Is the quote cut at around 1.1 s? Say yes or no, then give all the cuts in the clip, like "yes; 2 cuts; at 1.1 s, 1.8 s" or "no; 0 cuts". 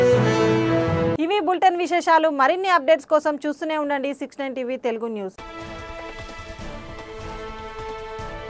no; 0 cuts